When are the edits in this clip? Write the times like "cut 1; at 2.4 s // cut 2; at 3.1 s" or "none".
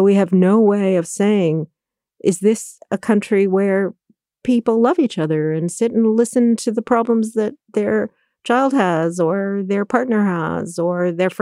none